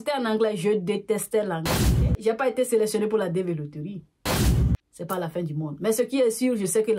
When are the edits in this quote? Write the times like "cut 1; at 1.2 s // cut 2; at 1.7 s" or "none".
cut 1; at 1.8 s